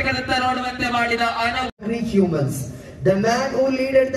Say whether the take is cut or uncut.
cut